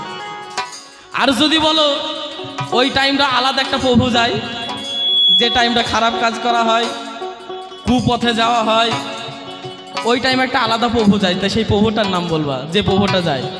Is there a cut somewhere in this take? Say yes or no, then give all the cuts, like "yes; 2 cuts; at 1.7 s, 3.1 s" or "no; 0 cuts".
no; 0 cuts